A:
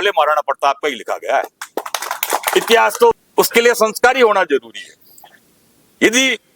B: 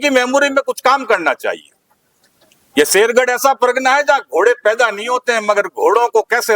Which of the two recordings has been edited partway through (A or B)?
A